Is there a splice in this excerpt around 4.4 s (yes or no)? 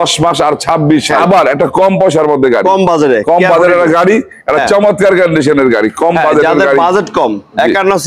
no